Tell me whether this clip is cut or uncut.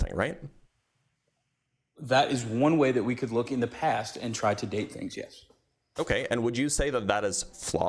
uncut